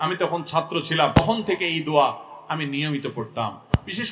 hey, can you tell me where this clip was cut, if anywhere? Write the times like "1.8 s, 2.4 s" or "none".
1.1 s